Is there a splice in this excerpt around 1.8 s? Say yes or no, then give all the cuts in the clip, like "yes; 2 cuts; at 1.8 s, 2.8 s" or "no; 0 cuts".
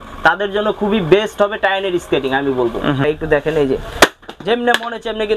no; 1 cut; at 3.0 s